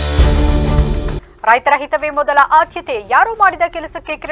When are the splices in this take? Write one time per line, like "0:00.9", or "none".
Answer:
none

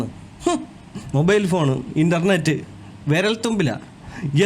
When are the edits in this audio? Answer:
0:01.0

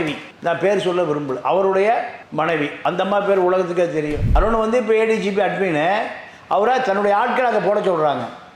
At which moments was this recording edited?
0:04.2

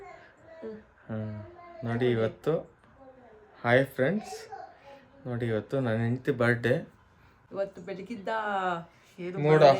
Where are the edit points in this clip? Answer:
0:07.4

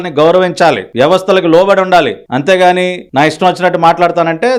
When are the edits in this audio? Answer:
none

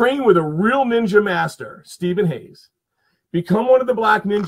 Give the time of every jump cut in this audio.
none

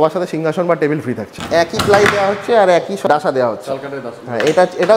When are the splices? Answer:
0:01.3
0:03.1

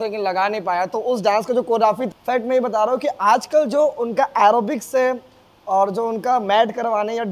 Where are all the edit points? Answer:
0:02.0

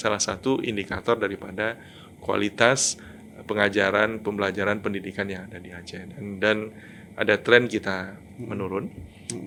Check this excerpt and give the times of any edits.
none

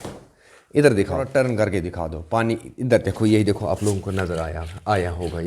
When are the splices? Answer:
0:01.3

